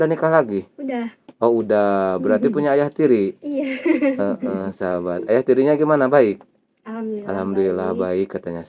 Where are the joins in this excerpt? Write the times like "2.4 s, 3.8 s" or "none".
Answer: none